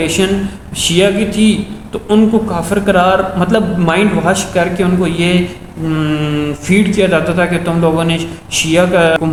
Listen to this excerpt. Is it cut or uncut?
uncut